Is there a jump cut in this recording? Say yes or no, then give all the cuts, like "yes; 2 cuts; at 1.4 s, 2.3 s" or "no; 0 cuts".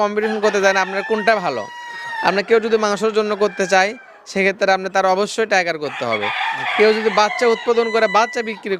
no; 0 cuts